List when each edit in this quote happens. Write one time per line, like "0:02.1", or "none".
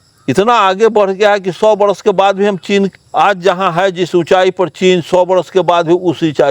0:03.0